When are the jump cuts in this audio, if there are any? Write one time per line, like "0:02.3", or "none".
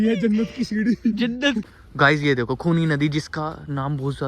0:01.6